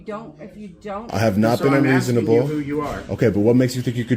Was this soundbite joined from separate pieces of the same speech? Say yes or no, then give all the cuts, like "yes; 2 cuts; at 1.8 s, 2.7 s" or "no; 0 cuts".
yes; 1 cut; at 1.1 s